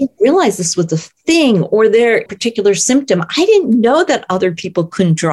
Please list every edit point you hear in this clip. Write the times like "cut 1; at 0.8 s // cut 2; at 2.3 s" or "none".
cut 1; at 2.3 s